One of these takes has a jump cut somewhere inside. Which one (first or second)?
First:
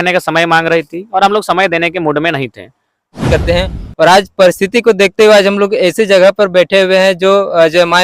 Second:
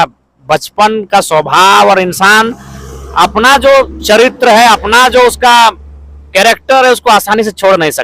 first